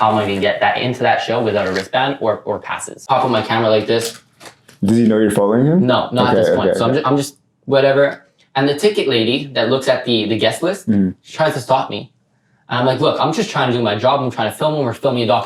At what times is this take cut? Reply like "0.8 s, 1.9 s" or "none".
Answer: 3.0 s